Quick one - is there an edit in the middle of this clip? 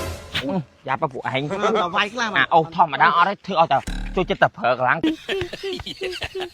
yes; 1 cut; at 5.0 s

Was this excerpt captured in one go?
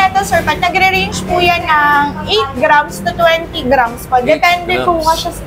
yes; 0 cuts

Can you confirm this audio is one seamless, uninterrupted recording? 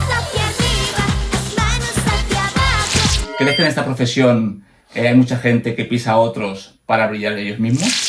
no; 1 cut; at 3.2 s

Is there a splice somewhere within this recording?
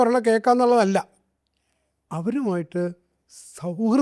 no; 0 cuts

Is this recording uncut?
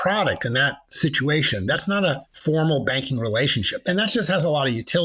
no; 2 cuts; at 2.3 s, 3.8 s

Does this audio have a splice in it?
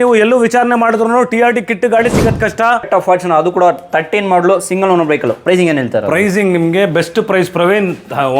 yes; 1 cut; at 2.8 s

